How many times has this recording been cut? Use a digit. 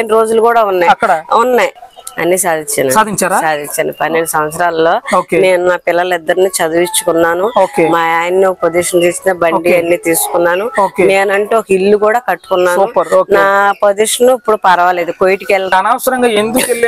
2